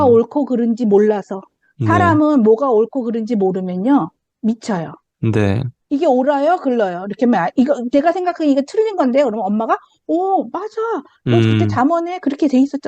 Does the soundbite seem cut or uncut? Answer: cut